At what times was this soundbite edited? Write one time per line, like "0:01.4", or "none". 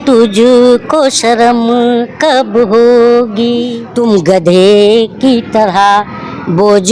0:03.8